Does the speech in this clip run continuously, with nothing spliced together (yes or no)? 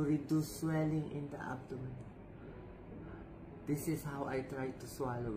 yes